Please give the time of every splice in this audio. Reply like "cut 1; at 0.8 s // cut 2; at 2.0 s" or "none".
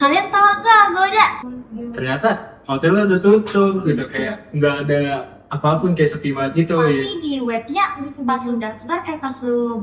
cut 1; at 1.4 s